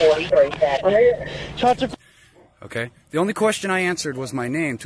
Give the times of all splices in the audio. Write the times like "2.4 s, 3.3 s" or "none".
0.8 s, 1.9 s